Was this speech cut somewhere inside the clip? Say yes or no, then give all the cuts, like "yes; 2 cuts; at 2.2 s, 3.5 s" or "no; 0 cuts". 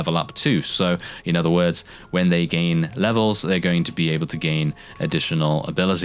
no; 0 cuts